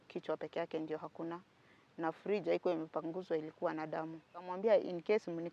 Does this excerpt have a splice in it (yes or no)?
yes